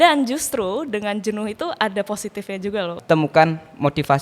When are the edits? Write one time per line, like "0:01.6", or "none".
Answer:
0:03.0